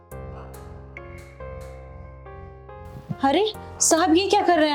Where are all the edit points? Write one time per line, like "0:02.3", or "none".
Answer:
0:03.0